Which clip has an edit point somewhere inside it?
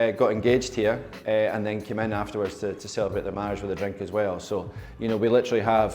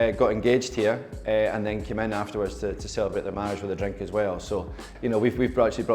second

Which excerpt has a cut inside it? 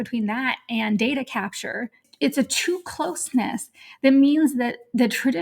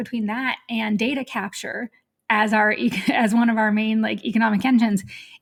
first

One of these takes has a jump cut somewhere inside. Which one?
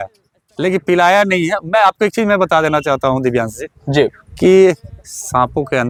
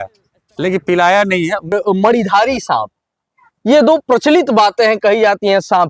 second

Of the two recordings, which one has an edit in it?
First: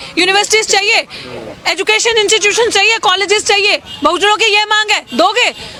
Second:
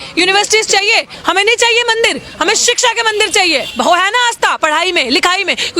second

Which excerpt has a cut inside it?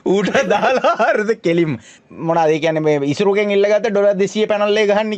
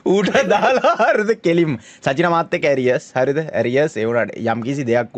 first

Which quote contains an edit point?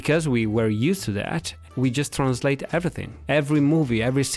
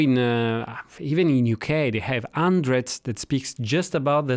first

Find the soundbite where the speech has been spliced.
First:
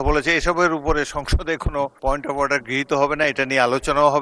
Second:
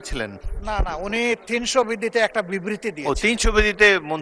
first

